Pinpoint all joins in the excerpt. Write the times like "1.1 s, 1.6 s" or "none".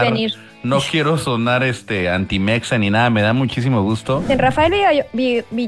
4.3 s